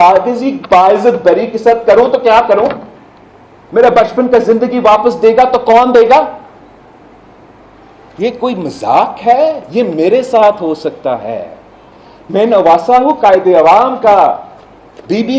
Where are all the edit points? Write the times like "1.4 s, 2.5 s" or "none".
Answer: none